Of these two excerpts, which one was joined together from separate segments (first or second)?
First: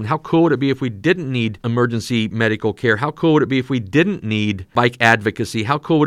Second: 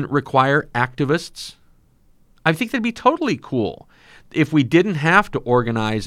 first